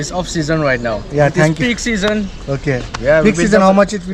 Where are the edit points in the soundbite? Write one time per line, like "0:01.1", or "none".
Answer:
none